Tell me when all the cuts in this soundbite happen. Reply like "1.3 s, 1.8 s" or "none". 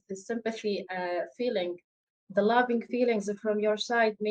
none